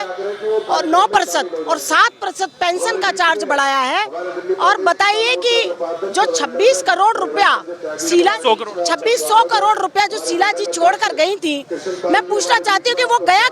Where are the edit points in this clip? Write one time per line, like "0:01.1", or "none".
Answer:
none